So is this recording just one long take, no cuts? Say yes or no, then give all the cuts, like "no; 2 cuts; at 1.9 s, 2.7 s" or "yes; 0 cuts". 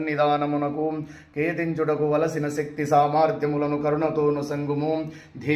yes; 0 cuts